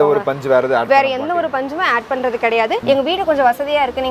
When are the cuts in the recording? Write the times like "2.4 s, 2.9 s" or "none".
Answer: 2.8 s